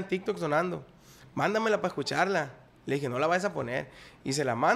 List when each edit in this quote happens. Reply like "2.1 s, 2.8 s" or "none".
none